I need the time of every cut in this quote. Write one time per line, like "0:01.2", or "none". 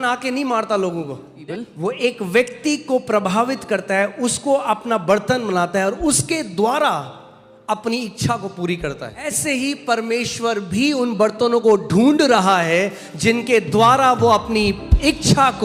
0:01.3
0:09.2